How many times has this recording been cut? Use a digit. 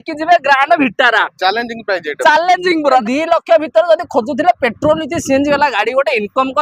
1